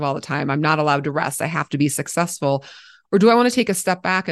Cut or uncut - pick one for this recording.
uncut